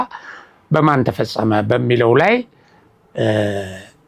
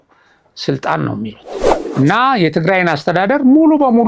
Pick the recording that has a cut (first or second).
second